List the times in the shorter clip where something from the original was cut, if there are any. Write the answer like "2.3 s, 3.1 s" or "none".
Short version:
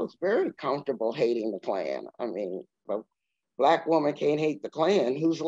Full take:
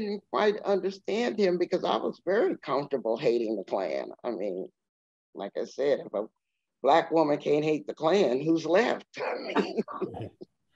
2.8 s